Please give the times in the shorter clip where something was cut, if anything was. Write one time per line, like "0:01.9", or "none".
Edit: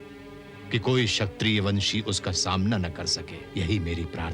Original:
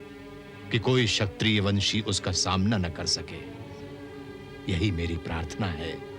0:03.4